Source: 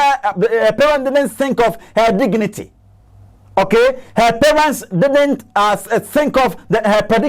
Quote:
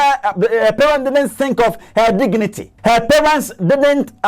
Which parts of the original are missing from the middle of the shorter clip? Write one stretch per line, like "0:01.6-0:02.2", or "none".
0:02.7-0:04.0